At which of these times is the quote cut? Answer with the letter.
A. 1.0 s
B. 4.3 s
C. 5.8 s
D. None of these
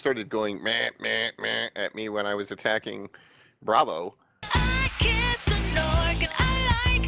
B